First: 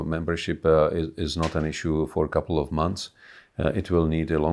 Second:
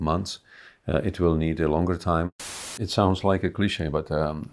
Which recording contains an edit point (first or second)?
second